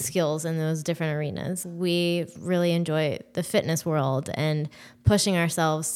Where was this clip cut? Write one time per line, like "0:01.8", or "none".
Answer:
0:01.6